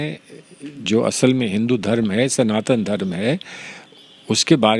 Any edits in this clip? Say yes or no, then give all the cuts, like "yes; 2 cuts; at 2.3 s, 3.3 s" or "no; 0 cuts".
no; 0 cuts